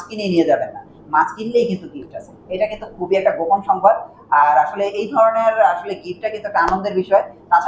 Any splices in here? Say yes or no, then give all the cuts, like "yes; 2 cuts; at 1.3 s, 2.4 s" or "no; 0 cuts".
no; 0 cuts